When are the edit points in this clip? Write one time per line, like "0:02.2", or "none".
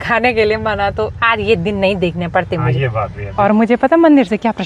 0:03.3